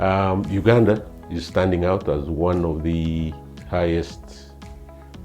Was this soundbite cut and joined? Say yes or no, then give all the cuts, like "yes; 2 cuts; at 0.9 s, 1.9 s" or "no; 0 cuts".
yes; 1 cut; at 3.5 s